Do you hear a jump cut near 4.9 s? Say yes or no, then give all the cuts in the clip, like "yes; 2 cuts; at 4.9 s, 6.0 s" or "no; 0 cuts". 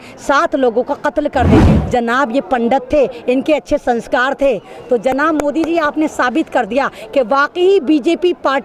no; 1 cut; at 1.6 s